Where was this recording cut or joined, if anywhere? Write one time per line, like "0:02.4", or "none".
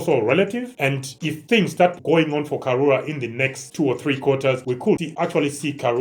0:02.0